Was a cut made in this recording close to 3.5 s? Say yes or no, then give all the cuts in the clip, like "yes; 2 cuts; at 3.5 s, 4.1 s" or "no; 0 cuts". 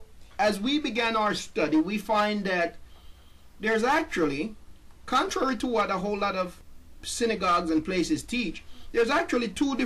no; 1 cut; at 6.7 s